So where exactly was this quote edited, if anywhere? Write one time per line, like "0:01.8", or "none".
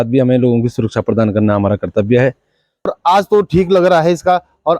0:02.9